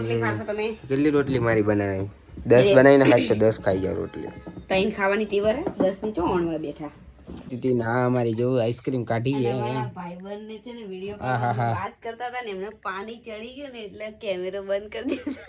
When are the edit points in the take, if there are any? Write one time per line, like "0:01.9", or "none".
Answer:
0:07.5